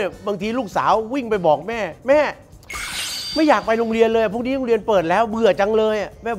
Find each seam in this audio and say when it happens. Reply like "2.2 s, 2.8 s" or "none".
none